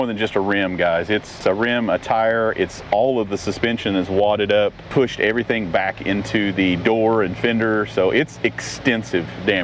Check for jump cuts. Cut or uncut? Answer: cut